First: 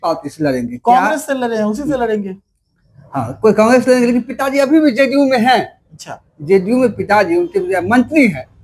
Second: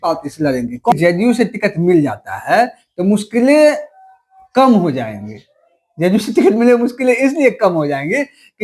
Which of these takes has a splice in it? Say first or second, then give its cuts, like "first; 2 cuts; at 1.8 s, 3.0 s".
second; 1 cut; at 0.9 s